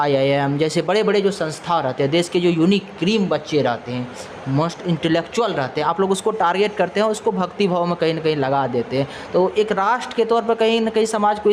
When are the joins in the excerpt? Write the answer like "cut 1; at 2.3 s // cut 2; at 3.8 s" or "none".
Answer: none